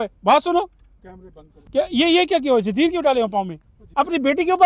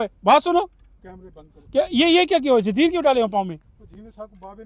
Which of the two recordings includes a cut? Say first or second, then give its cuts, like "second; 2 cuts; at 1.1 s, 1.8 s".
first; 1 cut; at 3.8 s